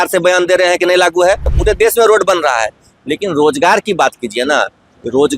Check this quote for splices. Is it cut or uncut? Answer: cut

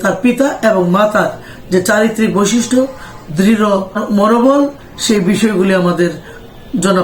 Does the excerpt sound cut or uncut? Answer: cut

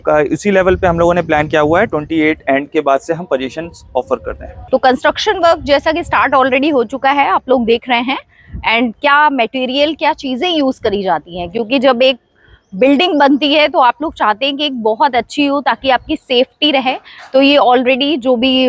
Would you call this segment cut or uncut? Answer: uncut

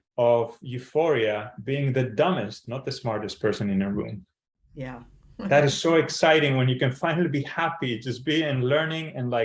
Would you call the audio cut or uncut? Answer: uncut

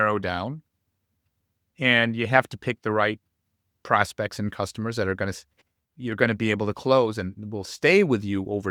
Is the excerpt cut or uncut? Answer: uncut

